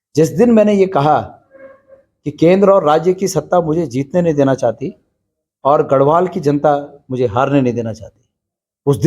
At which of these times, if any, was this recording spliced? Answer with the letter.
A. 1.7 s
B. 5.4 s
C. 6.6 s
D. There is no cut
D